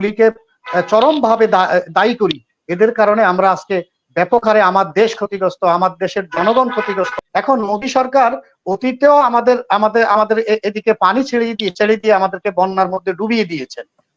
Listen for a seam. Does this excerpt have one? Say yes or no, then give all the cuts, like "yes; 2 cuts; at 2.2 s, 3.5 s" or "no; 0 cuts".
yes; 1 cut; at 7.1 s